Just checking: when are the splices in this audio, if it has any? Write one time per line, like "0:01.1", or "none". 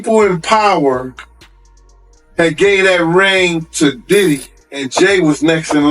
0:04.9